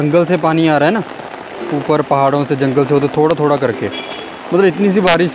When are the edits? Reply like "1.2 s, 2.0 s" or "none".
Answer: none